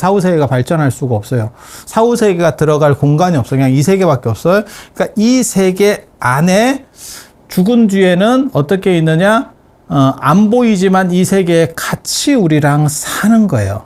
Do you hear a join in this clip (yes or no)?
no